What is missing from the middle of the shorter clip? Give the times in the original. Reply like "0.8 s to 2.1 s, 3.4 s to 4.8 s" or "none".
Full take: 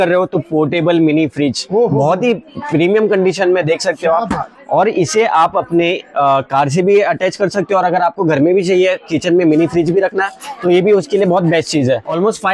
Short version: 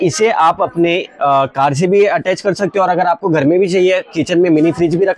none